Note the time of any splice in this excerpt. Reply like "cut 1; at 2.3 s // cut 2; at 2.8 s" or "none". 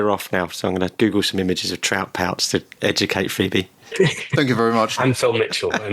cut 1; at 0.9 s

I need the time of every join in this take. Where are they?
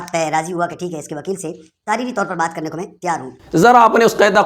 cut 1; at 3.4 s

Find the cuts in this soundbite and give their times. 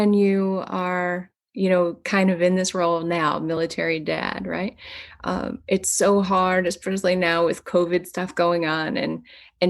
none

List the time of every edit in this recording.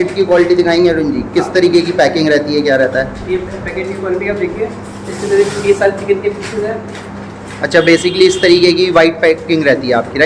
none

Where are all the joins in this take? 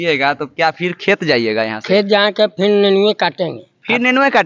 none

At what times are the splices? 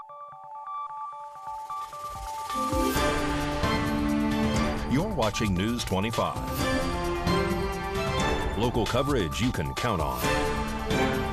none

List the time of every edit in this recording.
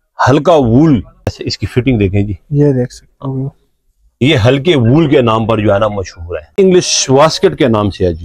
cut 1; at 1.4 s // cut 2; at 6.5 s

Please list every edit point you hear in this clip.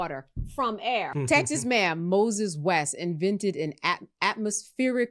cut 1; at 1.1 s

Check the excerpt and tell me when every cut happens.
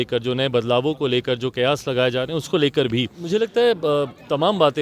cut 1; at 3.2 s

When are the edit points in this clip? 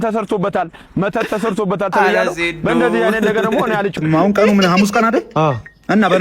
cut 1; at 3.9 s

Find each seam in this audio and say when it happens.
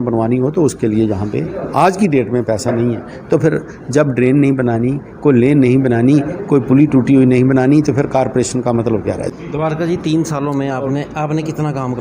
cut 1; at 9.3 s

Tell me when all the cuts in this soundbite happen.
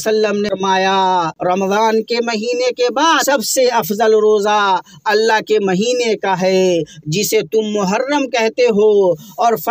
cut 1; at 1.3 s // cut 2; at 3.2 s

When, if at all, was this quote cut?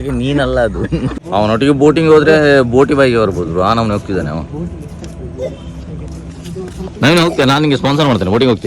cut 1; at 1.5 s // cut 2; at 4.8 s

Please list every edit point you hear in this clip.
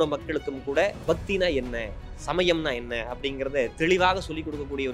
none

